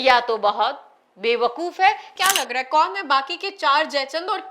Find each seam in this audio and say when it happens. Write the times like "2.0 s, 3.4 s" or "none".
2.1 s